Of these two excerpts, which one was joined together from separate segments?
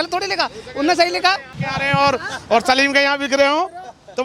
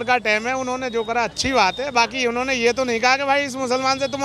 first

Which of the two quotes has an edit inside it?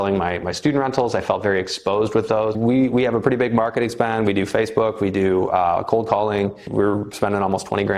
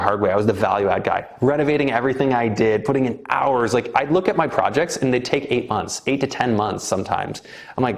first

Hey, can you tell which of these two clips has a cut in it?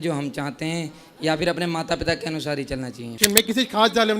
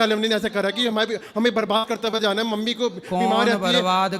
first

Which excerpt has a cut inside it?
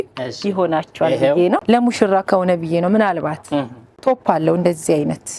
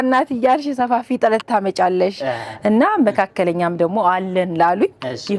first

